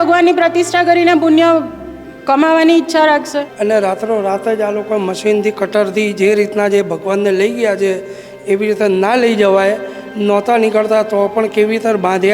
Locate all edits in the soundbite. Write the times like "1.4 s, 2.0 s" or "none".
3.5 s